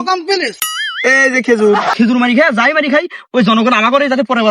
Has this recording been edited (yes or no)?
yes